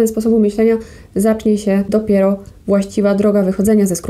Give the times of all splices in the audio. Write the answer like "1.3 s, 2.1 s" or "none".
1.9 s